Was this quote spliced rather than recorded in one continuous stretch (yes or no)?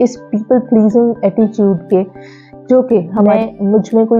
yes